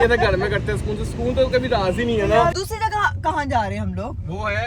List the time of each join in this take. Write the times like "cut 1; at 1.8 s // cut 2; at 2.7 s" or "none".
cut 1; at 2.6 s